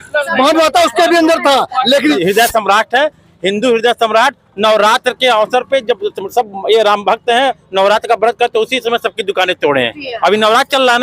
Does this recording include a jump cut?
yes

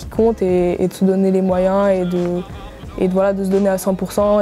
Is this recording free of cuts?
yes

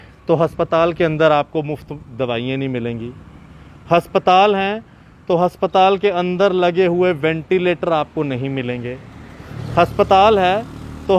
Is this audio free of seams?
yes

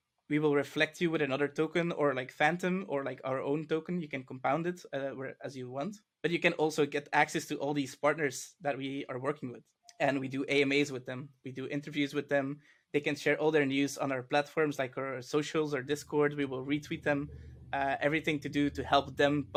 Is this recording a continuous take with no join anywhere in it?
yes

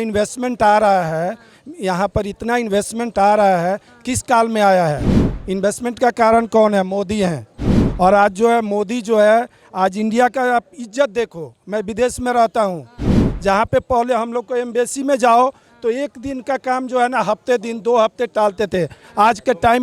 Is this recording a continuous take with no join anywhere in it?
yes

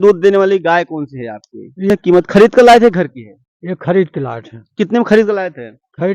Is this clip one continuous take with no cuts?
no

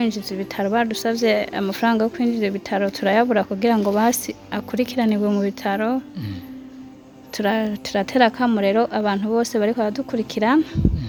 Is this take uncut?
yes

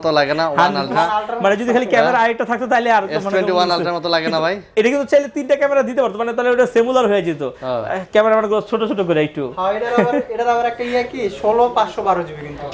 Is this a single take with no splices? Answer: yes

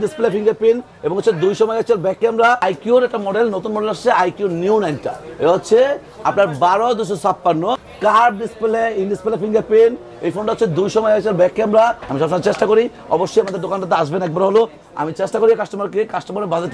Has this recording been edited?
yes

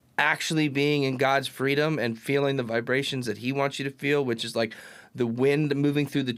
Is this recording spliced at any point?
no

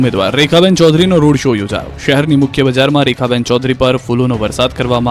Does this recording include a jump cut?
no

